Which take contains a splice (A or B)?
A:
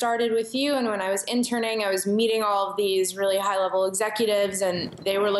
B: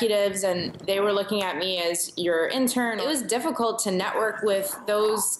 B